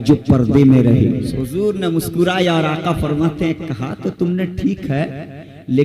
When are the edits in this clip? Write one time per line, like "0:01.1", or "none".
0:01.3

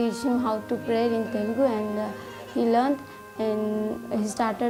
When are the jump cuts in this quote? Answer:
none

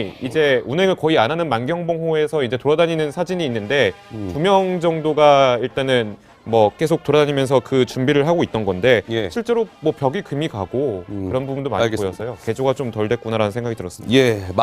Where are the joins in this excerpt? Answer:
0:02.0

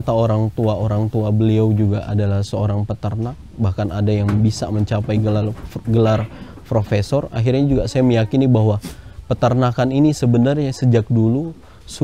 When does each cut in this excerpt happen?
none

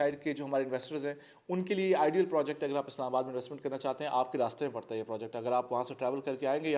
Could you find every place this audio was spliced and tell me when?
none

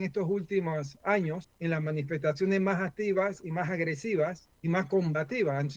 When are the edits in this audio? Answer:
0:01.5
0:04.5

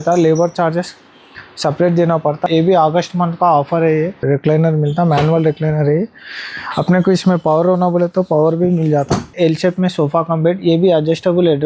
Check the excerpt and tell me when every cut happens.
0:02.4
0:04.2
0:09.3

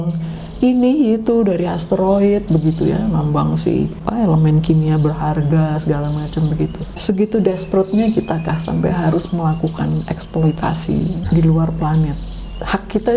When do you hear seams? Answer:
0:04.0
0:07.0
0:11.2

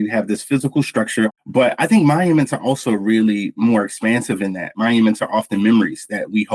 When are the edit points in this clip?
0:01.3
0:04.7

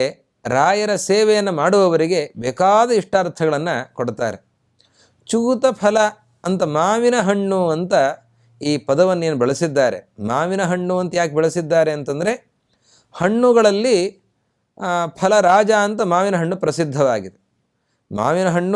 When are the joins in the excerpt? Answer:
none

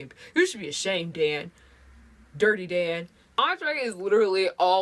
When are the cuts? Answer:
0:03.3

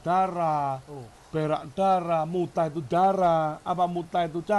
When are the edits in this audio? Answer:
none

